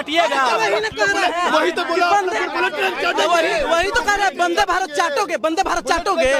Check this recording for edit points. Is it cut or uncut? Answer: uncut